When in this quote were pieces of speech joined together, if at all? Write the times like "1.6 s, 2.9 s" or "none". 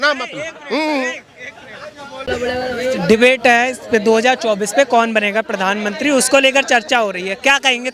none